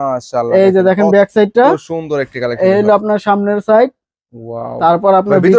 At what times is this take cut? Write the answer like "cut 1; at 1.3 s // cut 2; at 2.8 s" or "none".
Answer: none